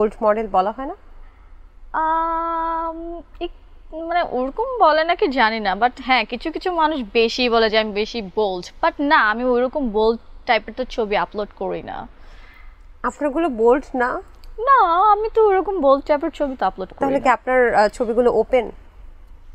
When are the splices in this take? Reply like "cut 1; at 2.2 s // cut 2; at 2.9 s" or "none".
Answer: none